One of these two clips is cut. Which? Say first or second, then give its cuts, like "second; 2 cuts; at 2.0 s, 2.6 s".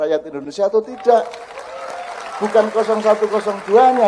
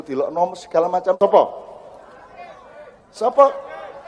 second; 1 cut; at 1.2 s